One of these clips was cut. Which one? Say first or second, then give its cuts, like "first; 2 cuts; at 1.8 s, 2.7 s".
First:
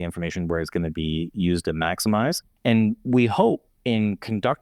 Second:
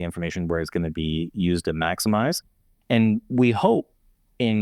first; 2 cuts; at 2.5 s, 3.7 s